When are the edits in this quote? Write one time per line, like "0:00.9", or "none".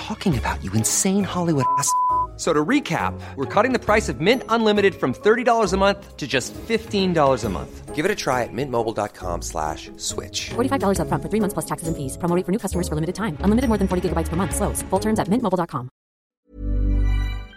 0:16.4